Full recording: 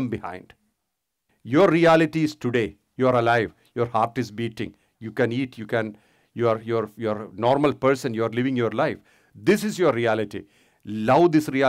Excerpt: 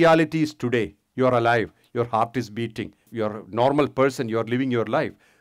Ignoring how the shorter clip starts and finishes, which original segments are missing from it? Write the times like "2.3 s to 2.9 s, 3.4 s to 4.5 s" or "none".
4.9 s to 6.9 s

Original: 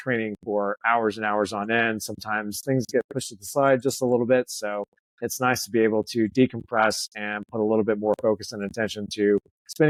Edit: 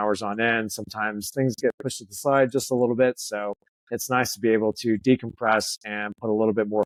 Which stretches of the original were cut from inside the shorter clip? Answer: none

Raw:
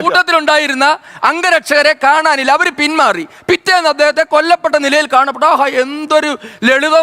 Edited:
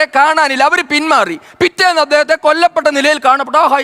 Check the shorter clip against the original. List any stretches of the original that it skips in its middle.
none

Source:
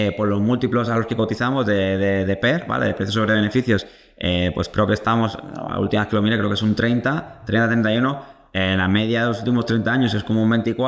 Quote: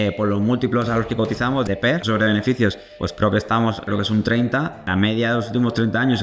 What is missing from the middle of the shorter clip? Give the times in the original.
1.7 s to 2.7 s, 4.1 s to 4.6 s, 5.4 s to 6.4 s, 7.4 s to 8.8 s

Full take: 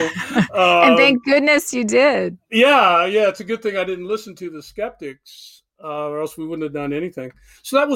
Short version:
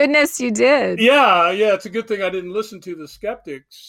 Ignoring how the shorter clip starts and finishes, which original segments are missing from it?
2.3 s to 2.5 s

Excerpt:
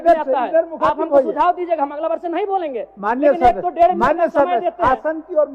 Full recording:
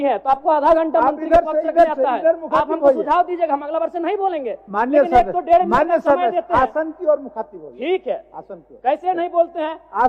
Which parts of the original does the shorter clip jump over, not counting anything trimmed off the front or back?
none

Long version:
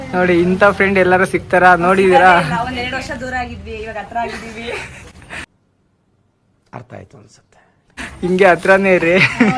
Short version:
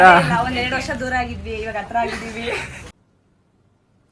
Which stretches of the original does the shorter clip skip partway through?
5.2 s to 5.5 s

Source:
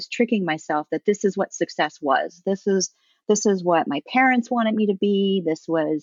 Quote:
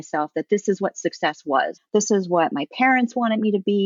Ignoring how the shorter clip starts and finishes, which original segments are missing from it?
2.3 s to 3.1 s

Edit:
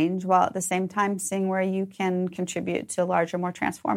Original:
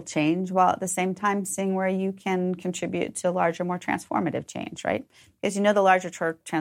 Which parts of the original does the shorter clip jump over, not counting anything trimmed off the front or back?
none

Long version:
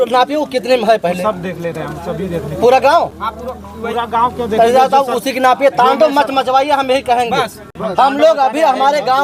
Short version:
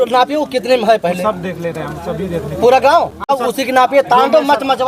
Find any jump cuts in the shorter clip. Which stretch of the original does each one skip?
3.5 s to 5.2 s

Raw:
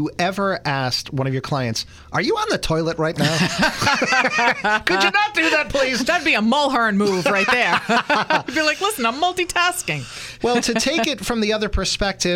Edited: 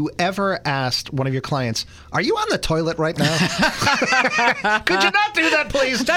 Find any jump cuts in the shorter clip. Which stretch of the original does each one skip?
none

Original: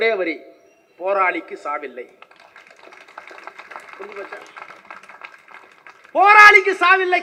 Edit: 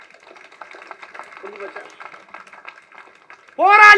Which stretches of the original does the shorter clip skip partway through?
none

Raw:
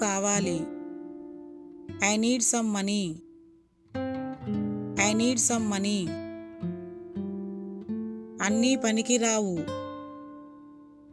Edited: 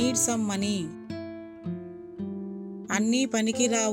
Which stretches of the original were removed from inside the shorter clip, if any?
3.4 s to 6.1 s, 7.8 s to 8.4 s

